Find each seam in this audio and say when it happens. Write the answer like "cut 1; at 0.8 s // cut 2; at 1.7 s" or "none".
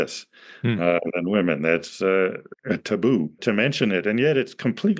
cut 1; at 2.5 s // cut 2; at 3.4 s